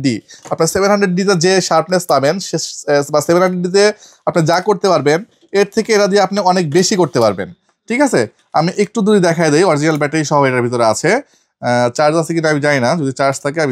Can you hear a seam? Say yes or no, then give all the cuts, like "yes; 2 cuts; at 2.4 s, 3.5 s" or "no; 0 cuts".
no; 0 cuts